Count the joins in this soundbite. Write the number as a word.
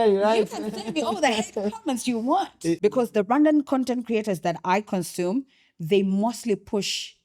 one